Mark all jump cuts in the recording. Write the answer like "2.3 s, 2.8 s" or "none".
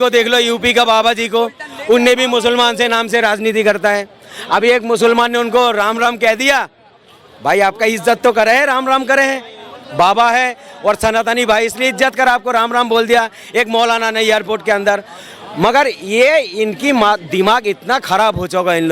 none

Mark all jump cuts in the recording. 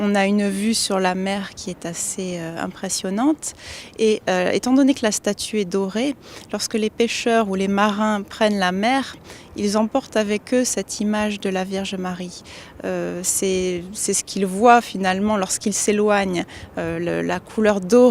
15.8 s

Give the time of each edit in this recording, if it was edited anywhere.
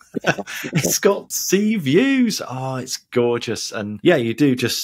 1.3 s, 3.9 s

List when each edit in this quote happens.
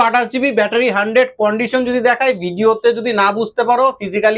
none

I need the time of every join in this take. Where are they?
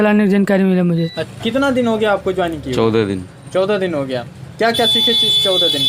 1.2 s

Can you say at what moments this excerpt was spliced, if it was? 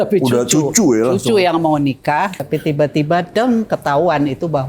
2.3 s

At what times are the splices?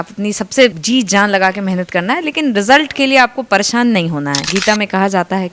0.8 s, 4.4 s

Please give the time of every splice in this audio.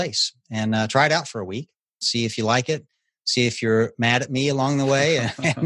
2.0 s

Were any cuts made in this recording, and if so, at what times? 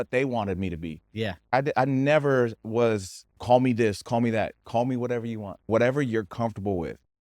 1.5 s, 5.6 s

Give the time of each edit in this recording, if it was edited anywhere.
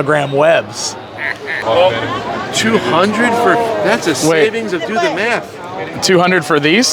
1.6 s

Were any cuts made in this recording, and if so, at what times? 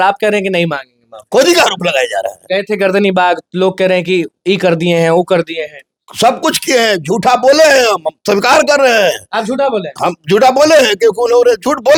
none

